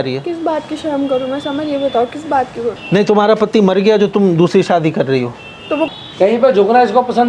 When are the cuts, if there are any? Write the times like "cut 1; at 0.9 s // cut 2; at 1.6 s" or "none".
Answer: cut 1; at 5.9 s